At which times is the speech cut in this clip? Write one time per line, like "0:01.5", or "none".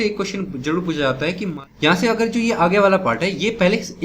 0:01.5